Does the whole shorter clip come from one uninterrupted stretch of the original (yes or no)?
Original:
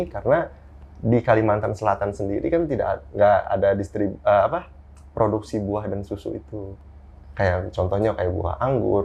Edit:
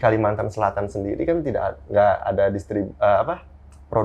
yes